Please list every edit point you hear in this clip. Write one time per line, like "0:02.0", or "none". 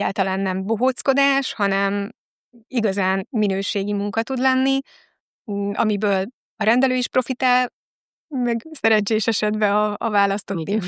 none